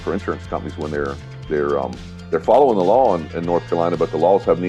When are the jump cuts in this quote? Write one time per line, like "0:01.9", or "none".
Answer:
none

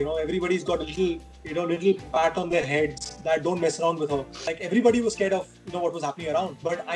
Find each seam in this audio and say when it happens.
0:04.4

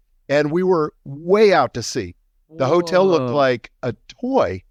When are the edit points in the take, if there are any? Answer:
none

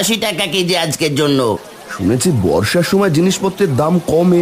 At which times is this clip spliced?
0:01.7

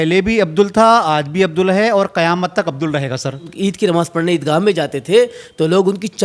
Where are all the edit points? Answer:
0:03.5

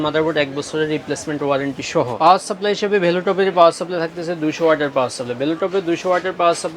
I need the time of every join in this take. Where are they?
0:02.1

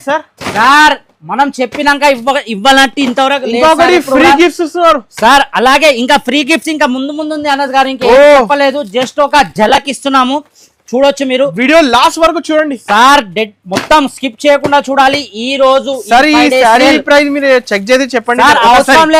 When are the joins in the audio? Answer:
none

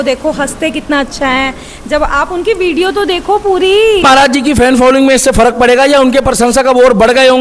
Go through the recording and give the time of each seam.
0:04.0

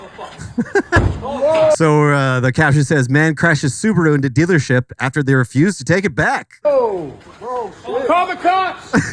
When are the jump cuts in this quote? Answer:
0:06.6

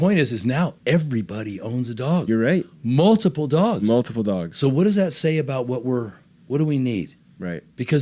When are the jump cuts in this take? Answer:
none

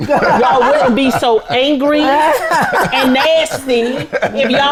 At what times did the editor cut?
none

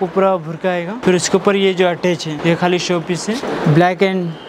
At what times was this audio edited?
0:00.9
0:02.3
0:03.4

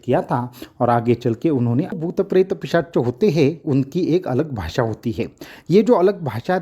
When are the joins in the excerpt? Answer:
0:02.0

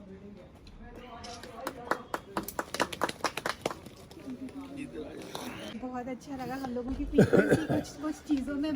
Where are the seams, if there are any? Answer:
0:05.7

